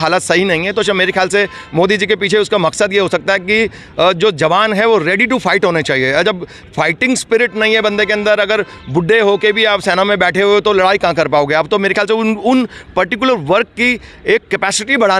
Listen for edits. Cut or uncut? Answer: uncut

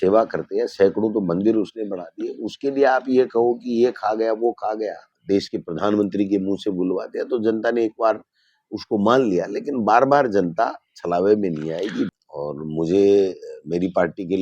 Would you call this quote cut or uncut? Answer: cut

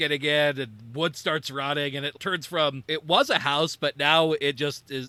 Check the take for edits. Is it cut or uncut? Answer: uncut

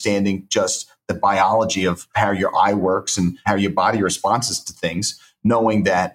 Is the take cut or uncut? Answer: cut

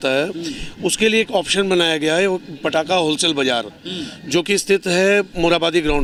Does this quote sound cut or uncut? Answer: uncut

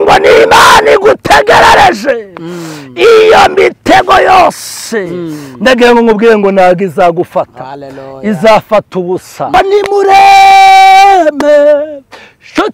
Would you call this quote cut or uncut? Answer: cut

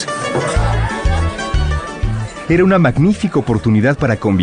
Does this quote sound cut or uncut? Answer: uncut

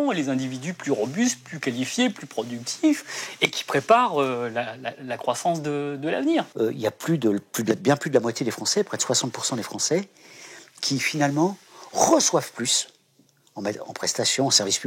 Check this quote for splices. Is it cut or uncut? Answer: cut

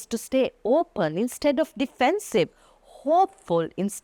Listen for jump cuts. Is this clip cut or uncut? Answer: uncut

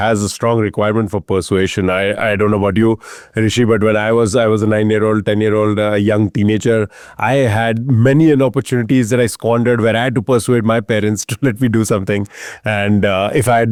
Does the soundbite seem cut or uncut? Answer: uncut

